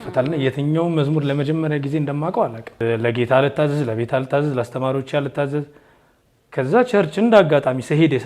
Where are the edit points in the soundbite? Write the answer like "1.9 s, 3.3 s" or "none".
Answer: 2.8 s